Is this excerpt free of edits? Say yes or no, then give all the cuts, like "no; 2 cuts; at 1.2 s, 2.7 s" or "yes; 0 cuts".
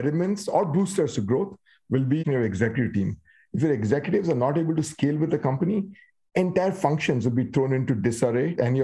no; 1 cut; at 2.2 s